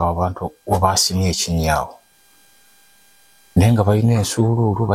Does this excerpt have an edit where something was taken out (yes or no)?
no